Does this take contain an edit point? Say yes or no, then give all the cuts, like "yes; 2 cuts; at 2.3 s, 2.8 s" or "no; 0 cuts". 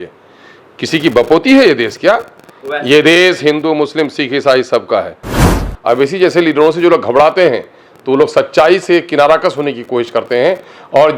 yes; 1 cut; at 5.4 s